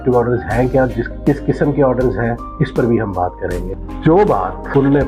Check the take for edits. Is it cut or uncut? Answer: uncut